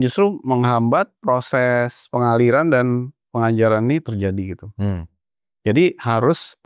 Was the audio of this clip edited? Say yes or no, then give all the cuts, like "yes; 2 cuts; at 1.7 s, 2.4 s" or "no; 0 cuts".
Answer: no; 0 cuts